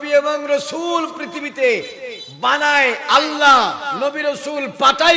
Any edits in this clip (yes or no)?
yes